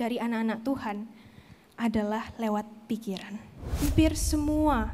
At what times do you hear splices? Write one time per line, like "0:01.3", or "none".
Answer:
0:03.8